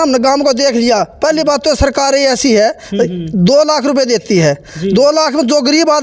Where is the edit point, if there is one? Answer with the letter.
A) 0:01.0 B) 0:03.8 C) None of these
C